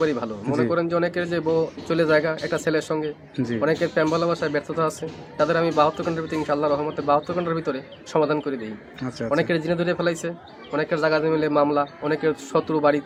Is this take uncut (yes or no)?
yes